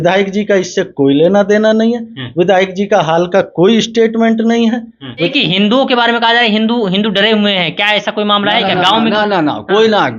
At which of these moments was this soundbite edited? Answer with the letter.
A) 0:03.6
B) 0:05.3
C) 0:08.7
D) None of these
B